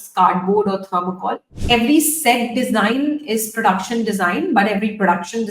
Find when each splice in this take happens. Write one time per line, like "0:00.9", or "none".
0:01.5